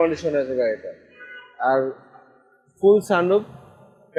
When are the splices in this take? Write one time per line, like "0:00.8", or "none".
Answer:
none